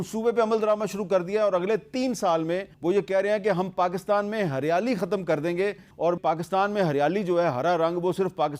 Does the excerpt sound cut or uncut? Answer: cut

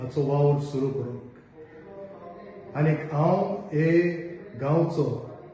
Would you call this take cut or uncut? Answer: uncut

